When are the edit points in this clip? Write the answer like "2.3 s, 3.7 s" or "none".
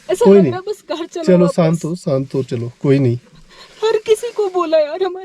none